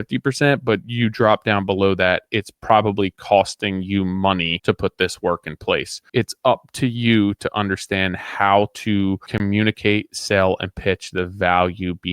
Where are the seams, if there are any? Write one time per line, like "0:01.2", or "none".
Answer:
0:04.5
0:06.0